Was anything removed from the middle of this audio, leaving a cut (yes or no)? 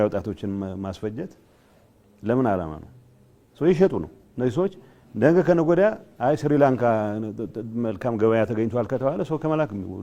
no